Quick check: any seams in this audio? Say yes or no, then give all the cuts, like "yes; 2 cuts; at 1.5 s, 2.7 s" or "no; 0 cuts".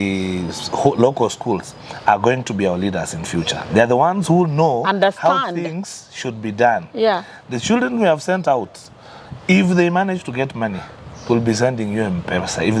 no; 0 cuts